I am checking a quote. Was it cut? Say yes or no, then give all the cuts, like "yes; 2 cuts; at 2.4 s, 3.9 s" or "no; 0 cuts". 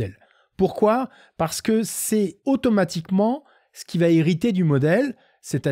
yes; 1 cut; at 2.4 s